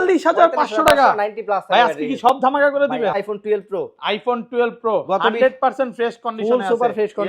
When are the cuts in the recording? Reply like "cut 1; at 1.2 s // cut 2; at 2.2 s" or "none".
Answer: cut 1; at 3.2 s